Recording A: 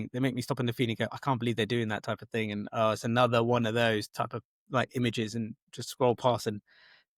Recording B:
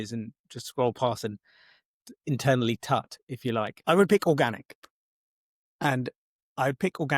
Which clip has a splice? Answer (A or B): B